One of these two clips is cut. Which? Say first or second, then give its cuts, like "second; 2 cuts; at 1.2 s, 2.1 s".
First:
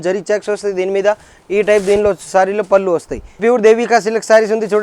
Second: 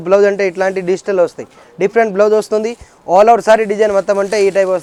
first; 1 cut; at 3.4 s